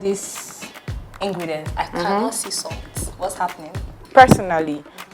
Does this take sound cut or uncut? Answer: cut